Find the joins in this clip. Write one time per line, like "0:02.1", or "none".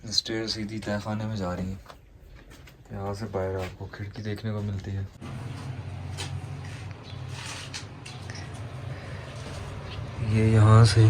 0:05.2